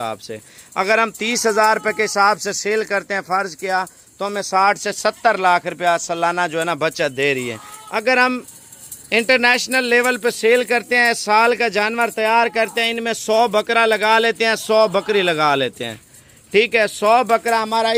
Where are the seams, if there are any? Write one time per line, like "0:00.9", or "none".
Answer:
none